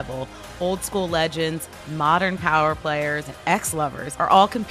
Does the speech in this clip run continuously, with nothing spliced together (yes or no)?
no